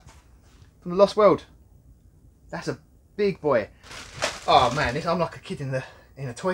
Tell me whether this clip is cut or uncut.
cut